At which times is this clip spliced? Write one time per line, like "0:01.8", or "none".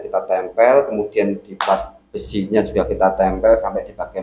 none